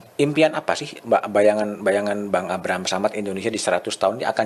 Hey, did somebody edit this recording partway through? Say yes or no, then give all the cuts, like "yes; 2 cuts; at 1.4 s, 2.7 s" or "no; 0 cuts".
no; 0 cuts